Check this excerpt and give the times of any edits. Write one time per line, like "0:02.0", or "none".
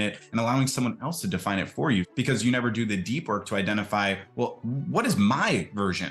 0:02.1